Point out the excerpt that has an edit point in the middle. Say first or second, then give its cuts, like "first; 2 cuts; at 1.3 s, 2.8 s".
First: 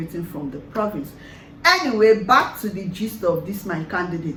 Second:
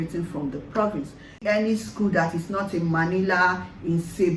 second; 1 cut; at 1.4 s